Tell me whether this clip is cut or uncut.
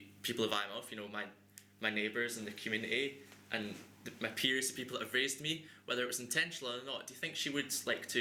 uncut